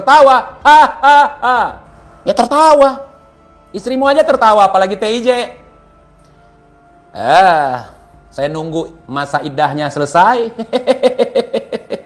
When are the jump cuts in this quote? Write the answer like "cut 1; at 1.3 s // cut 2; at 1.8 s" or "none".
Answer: none